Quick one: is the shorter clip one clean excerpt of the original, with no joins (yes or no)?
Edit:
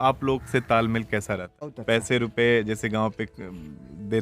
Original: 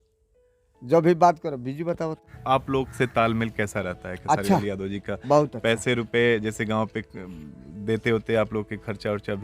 no